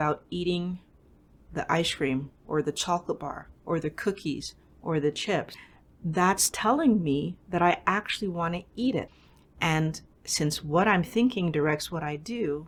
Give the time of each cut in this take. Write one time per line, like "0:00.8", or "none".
none